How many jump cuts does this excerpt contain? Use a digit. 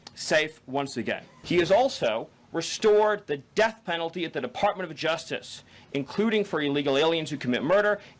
1